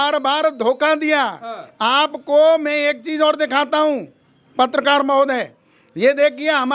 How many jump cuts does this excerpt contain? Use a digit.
0